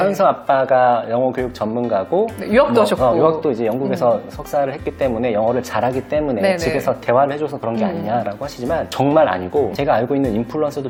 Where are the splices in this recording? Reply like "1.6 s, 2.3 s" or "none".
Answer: none